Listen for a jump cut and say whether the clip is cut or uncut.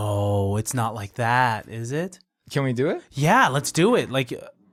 uncut